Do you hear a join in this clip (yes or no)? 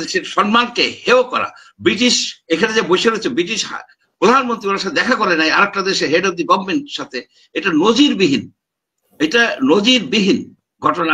no